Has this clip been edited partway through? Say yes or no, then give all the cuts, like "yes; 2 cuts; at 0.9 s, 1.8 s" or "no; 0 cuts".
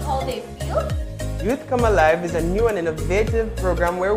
no; 0 cuts